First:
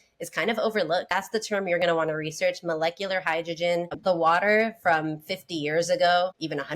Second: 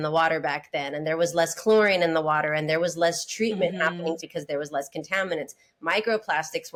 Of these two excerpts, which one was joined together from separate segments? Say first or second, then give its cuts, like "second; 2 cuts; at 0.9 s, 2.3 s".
first; 2 cuts; at 1.1 s, 3.9 s